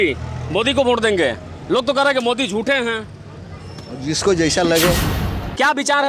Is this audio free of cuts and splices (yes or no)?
no